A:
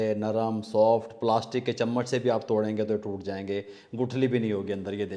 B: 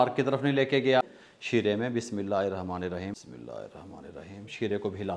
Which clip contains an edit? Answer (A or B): B